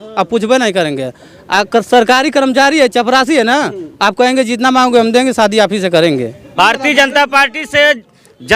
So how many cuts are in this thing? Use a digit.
1